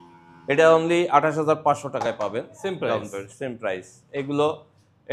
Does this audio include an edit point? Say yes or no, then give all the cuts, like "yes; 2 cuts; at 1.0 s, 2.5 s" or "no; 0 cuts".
no; 0 cuts